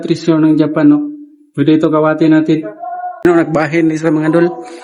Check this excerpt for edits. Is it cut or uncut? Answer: cut